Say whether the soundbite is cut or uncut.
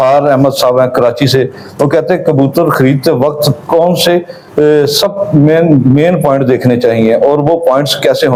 uncut